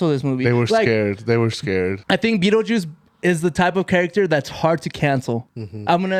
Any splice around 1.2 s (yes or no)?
no